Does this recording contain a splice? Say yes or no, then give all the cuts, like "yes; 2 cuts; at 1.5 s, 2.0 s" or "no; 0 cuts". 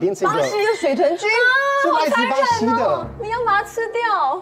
no; 0 cuts